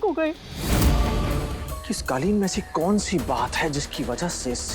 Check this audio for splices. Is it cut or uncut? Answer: cut